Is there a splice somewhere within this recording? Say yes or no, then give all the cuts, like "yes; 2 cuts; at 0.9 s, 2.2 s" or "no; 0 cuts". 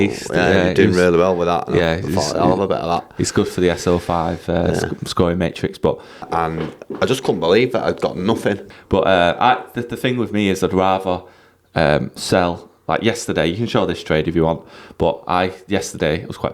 yes; 2 cuts; at 6.3 s, 8.7 s